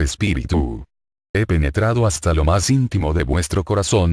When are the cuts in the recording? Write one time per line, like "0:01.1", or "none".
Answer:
0:03.2